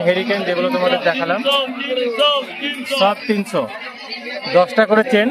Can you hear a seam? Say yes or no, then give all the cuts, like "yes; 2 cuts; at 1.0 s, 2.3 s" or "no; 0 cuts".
no; 0 cuts